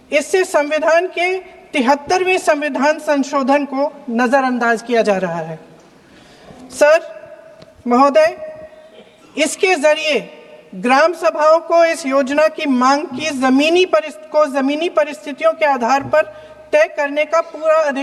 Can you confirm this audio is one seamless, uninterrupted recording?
yes; 0 cuts

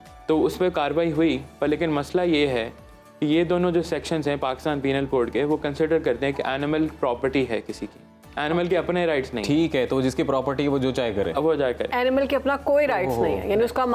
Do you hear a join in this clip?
no; 0 cuts

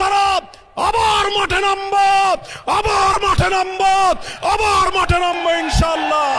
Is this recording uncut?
yes; 0 cuts

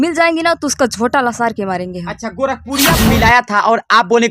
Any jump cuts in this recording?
yes; 1 cut; at 2.9 s

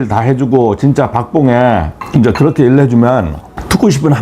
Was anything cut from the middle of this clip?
yes; 1 cut; at 2.0 s

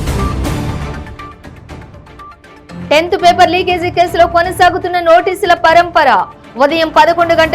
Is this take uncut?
no; 1 cut; at 2.6 s

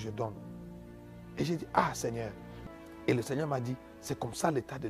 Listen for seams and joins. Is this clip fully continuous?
no; 1 cut; at 2.5 s

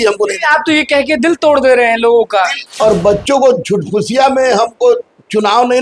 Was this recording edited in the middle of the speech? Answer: yes; 1 cut; at 2.6 s

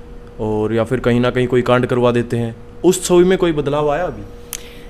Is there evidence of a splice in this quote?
no; 0 cuts

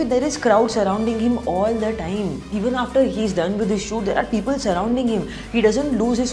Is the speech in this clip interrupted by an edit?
no; 0 cuts

